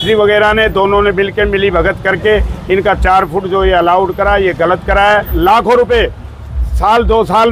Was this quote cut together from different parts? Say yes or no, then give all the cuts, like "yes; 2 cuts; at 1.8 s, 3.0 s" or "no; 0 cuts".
yes; 1 cut; at 5.3 s